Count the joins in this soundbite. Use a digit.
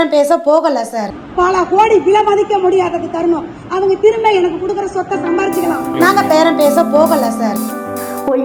0